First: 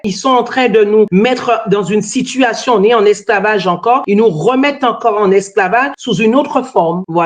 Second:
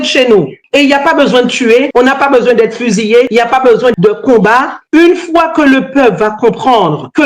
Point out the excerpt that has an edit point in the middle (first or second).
second